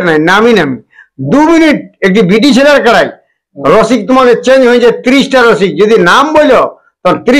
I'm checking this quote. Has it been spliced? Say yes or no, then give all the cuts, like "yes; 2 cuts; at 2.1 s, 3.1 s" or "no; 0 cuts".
no; 0 cuts